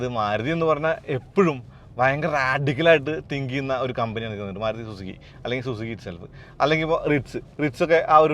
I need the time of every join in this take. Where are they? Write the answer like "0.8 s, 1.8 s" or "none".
none